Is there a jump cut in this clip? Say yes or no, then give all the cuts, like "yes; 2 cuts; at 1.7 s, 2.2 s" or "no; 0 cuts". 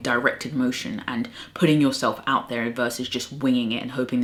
no; 0 cuts